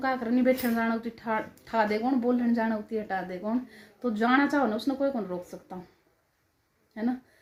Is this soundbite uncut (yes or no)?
yes